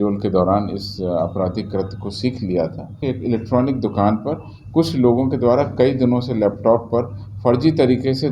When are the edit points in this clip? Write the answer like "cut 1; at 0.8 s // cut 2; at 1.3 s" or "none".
cut 1; at 2.9 s